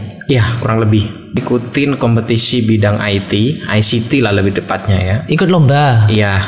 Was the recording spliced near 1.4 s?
yes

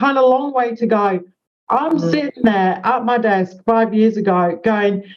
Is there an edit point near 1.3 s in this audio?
no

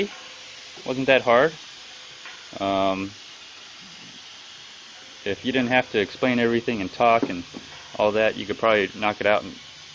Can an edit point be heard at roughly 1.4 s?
yes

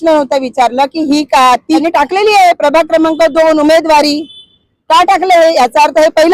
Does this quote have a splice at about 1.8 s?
yes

